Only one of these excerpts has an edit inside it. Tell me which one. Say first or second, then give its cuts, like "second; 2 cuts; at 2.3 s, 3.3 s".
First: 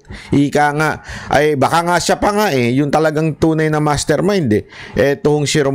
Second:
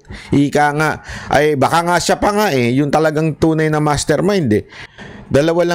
second; 1 cut; at 4.8 s